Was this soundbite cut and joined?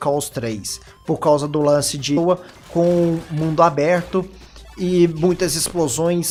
no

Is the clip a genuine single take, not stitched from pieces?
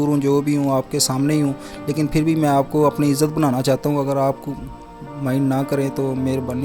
yes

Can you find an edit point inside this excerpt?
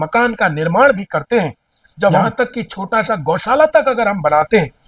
yes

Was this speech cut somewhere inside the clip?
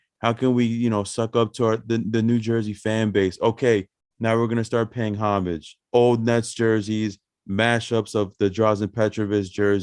yes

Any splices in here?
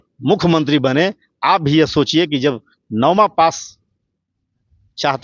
no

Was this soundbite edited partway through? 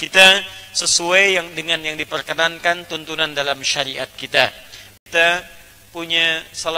yes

